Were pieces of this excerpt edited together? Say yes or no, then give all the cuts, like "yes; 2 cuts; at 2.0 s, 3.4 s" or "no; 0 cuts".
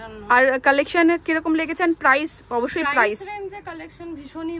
no; 0 cuts